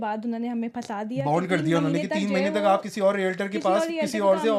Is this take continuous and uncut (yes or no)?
yes